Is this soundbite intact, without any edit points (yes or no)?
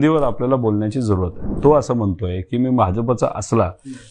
no